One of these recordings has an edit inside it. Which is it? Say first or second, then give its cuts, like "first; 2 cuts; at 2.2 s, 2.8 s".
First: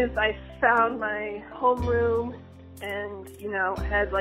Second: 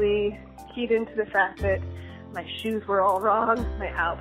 first; 1 cut; at 2.5 s